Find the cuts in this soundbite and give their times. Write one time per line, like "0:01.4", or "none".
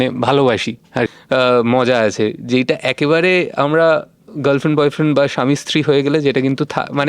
0:01.2